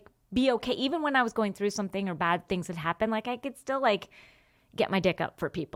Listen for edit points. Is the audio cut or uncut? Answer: uncut